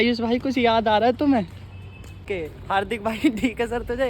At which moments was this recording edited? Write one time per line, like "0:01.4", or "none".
0:02.2